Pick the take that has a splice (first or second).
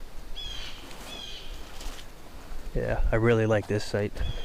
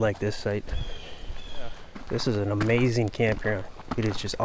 second